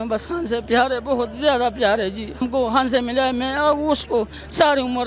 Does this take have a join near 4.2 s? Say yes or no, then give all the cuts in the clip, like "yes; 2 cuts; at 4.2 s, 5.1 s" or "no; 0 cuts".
no; 1 cut; at 2.4 s